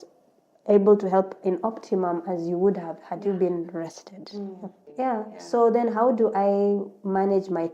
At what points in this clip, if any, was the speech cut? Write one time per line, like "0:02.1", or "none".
0:04.8